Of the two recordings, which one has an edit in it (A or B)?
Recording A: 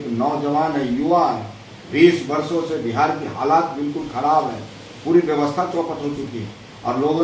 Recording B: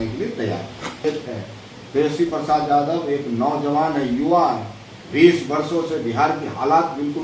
B